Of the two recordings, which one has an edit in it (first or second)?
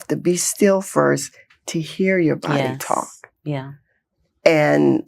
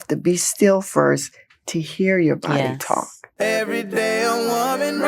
second